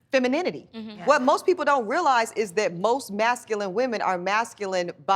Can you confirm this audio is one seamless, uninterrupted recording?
no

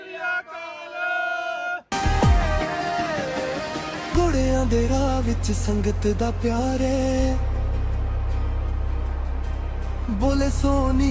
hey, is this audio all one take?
no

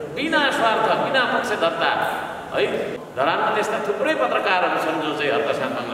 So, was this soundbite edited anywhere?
yes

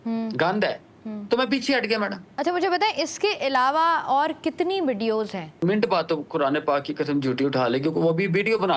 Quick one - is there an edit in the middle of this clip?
yes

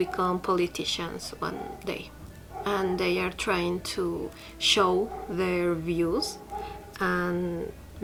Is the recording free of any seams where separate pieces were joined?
yes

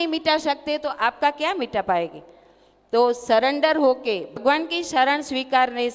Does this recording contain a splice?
yes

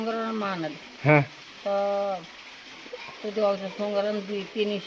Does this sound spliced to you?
no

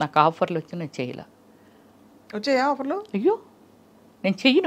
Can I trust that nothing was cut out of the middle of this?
yes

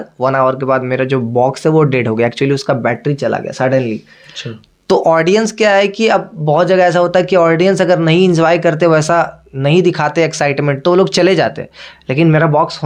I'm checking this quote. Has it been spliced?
no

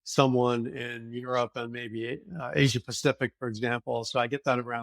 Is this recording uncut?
yes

